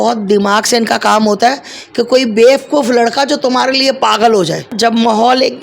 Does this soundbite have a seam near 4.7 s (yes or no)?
yes